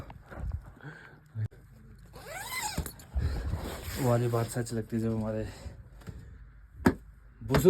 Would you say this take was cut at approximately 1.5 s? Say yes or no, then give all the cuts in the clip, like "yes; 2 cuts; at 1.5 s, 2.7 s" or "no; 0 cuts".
yes; 1 cut; at 1.5 s